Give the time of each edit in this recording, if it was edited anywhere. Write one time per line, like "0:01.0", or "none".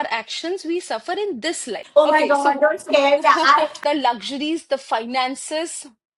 0:01.7
0:03.7